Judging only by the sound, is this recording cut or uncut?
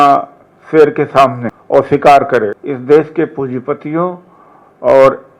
cut